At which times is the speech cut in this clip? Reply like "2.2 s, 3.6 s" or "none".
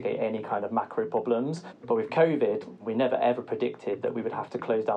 1.7 s, 2.8 s